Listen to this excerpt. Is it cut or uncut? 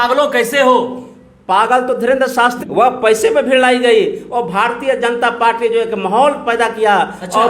cut